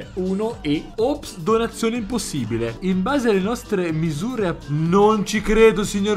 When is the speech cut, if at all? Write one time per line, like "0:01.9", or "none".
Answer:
0:00.9